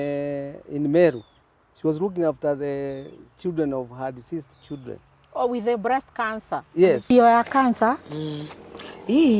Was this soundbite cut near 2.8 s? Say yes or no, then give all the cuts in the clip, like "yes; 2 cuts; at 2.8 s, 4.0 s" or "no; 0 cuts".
no; 1 cut; at 7.0 s